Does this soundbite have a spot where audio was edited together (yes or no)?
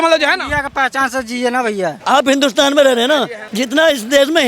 yes